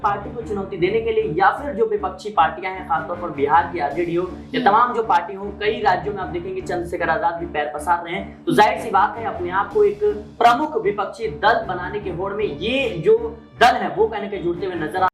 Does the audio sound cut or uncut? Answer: uncut